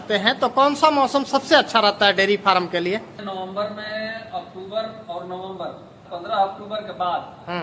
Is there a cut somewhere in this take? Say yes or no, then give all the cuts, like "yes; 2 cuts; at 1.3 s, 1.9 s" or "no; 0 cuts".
no; 0 cuts